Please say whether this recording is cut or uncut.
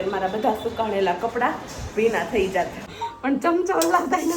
cut